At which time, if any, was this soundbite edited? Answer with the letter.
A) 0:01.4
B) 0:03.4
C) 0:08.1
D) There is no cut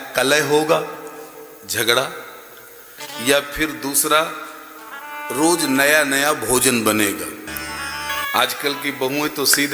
C